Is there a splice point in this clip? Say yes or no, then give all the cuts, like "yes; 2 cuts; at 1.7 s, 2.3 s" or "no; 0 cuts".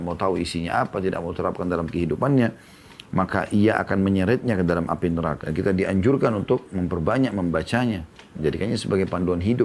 yes; 1 cut; at 5.4 s